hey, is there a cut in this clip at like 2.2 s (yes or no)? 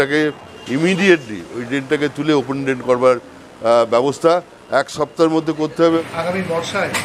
no